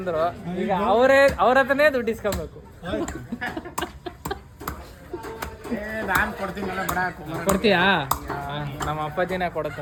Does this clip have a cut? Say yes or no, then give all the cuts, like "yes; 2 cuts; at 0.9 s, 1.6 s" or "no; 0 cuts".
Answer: no; 0 cuts